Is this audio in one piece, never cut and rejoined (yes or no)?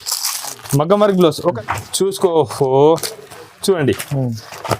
no